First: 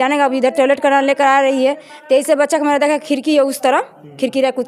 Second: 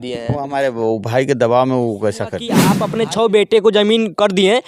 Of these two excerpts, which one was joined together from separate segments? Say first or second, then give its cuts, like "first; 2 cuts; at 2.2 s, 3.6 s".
second; 1 cut; at 2.8 s